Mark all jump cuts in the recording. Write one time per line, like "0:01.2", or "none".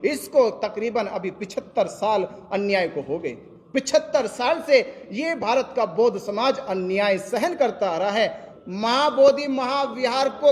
0:08.5